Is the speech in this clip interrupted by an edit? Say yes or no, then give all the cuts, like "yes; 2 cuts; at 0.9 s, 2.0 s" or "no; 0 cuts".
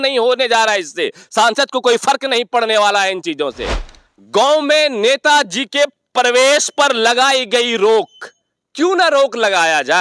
yes; 1 cut; at 3.7 s